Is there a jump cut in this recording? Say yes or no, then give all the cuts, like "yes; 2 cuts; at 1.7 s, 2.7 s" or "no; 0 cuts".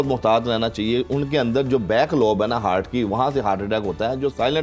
no; 0 cuts